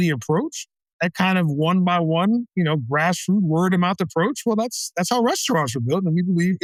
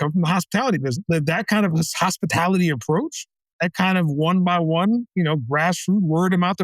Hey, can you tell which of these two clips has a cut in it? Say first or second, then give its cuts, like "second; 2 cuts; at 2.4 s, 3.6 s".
second; 1 cut; at 1.1 s